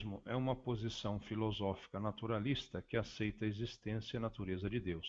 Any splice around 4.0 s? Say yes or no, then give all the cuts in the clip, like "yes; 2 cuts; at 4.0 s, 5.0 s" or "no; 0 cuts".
no; 0 cuts